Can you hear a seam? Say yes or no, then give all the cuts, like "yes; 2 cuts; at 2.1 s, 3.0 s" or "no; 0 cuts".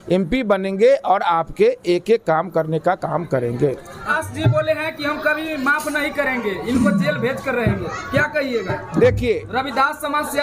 no; 0 cuts